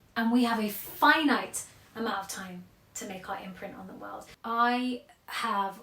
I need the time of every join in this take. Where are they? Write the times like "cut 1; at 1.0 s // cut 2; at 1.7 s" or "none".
cut 1; at 4.3 s